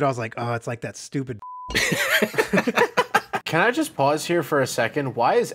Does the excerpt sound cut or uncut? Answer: cut